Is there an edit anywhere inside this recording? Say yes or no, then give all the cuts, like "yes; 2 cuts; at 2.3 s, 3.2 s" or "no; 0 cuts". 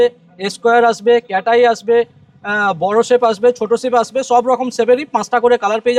no; 0 cuts